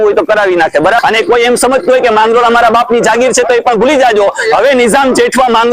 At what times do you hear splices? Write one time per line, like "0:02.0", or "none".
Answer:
0:01.0